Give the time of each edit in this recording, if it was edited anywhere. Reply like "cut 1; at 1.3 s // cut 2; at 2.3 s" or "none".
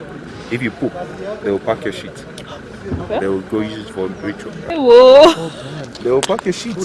cut 1; at 4.6 s